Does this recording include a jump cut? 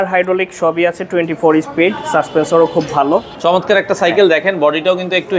yes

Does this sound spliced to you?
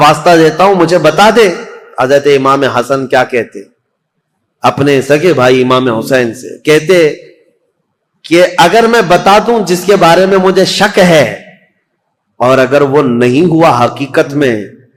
no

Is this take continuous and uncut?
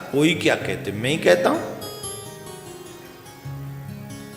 yes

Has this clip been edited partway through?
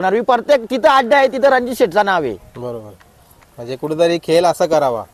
no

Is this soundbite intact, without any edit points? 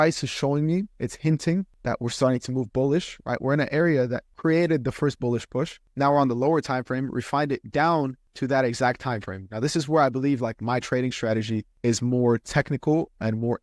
no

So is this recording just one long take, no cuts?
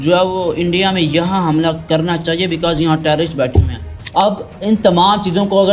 no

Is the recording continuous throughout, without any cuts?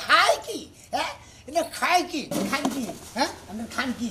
no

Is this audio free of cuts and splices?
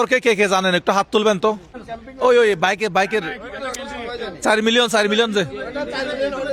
yes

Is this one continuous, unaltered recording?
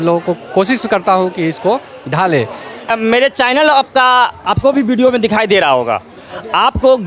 no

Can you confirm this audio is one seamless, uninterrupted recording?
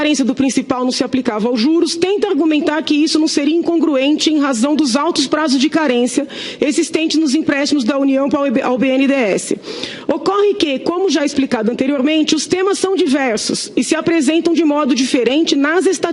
no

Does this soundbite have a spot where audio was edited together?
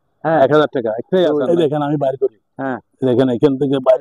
yes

